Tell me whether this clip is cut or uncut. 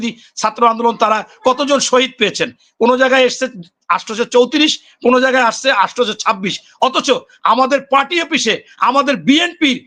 uncut